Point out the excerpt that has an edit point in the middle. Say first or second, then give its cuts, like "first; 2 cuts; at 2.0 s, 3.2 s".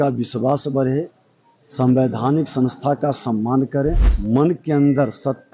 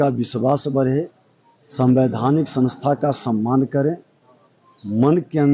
first; 1 cut; at 4.1 s